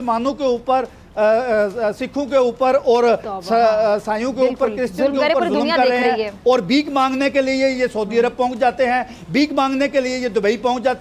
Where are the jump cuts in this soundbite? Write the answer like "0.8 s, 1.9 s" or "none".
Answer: none